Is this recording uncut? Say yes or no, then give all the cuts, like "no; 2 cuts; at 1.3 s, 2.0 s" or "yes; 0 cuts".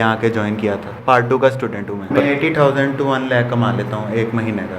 no; 2 cuts; at 0.9 s, 2.1 s